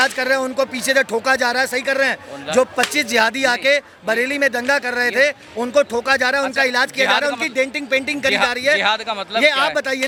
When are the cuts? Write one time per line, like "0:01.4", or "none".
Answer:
none